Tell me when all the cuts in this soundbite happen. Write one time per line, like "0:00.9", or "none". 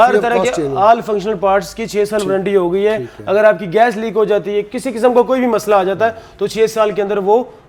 none